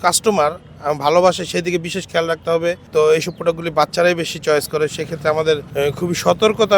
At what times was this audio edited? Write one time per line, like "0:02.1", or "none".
0:02.9
0:05.7